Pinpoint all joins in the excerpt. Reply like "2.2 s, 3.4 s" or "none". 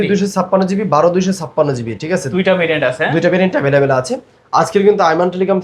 none